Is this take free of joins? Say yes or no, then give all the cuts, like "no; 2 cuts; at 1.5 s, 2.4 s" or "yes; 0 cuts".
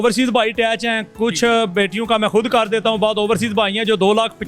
yes; 0 cuts